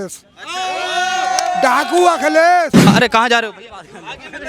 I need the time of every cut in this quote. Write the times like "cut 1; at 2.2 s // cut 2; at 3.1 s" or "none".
cut 1; at 2.8 s